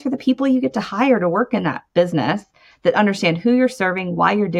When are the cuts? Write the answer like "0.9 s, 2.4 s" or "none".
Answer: 1.8 s